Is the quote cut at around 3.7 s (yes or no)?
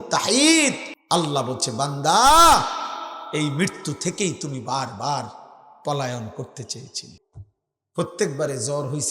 no